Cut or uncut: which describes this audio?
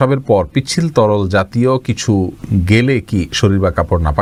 uncut